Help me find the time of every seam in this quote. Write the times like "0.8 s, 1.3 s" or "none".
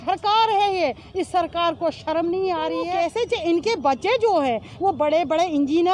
2.9 s